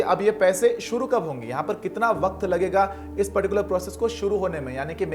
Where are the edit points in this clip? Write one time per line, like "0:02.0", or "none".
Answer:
none